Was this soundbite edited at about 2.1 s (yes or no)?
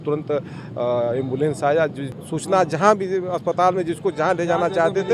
no